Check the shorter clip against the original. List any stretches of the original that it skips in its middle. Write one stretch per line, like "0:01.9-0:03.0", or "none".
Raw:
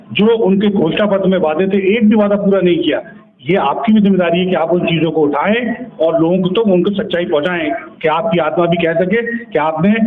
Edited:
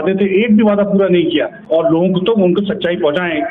0:03.1-0:05.9